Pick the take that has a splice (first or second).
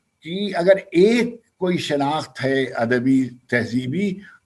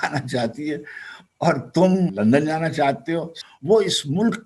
second